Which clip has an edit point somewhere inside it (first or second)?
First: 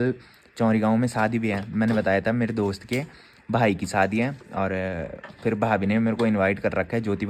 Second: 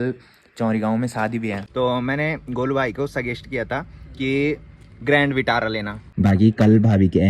second